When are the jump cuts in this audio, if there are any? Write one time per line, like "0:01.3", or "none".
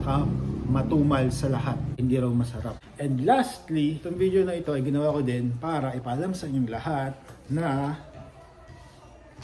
0:01.9
0:02.8
0:04.0